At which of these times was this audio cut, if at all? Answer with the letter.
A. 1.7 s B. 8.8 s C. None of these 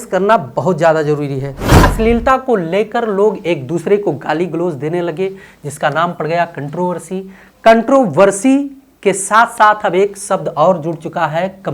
A